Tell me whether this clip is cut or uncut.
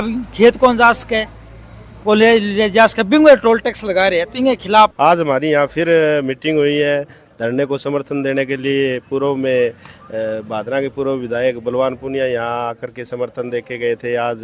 cut